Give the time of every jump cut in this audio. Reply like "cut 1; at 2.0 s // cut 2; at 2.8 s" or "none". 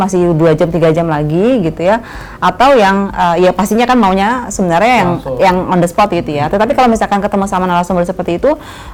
none